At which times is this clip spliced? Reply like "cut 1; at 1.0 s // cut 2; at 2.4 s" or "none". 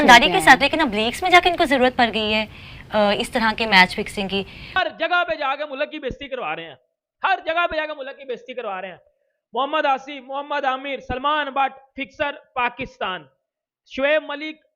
cut 1; at 4.8 s